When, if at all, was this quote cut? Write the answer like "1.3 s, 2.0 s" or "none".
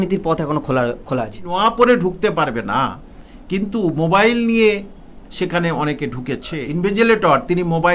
1.5 s, 6.5 s